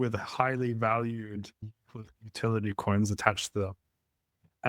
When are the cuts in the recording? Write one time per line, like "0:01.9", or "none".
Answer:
0:01.6